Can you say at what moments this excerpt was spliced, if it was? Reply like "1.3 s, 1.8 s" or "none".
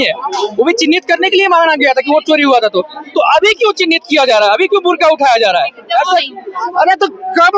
6.3 s